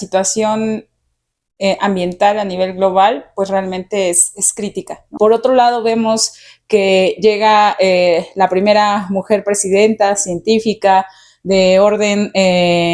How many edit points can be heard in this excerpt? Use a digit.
1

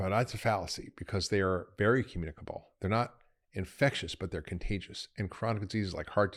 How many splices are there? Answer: 0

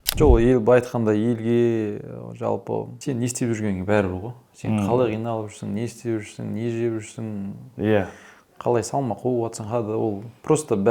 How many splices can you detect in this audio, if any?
1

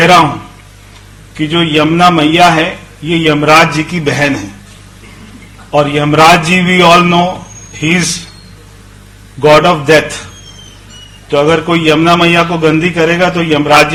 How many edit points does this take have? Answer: 0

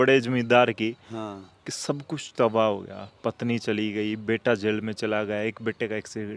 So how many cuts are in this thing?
0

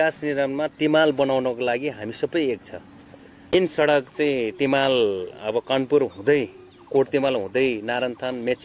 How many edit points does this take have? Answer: 1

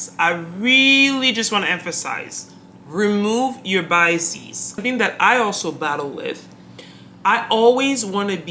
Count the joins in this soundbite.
1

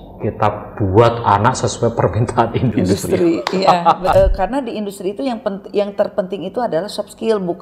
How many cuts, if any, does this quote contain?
1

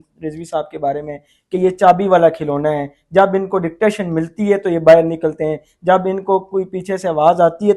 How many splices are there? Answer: 0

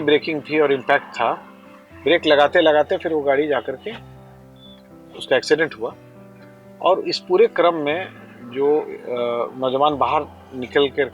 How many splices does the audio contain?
0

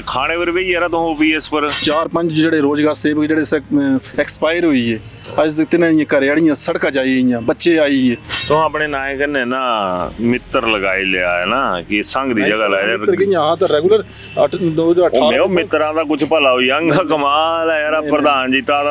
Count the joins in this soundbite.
2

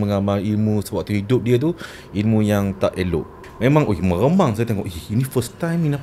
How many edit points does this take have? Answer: 1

